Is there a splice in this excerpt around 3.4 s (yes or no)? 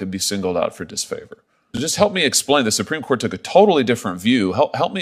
no